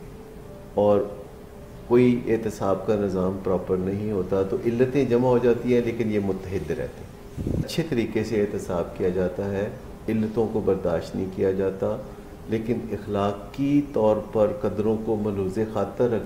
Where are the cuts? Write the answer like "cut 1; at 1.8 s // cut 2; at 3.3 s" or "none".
cut 1; at 7.6 s